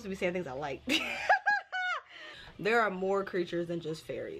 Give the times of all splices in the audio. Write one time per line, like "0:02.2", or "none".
0:02.4